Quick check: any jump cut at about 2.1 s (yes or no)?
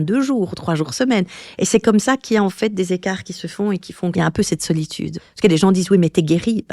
no